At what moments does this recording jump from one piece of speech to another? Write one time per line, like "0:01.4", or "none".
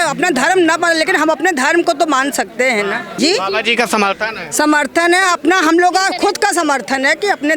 0:03.1